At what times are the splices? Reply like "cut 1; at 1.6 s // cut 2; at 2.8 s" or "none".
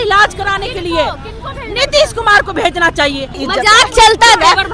cut 1; at 3.4 s

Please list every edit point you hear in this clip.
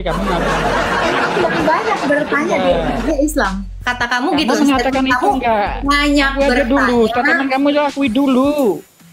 none

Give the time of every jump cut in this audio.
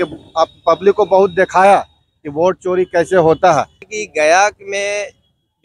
cut 1; at 3.9 s

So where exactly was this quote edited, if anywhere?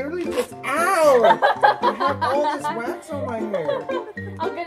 none

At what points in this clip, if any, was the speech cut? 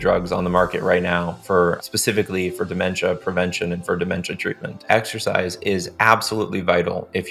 cut 1; at 1.8 s // cut 2; at 4.8 s

